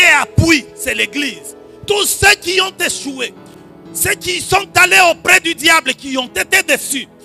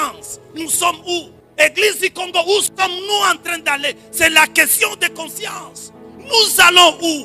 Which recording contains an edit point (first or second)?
second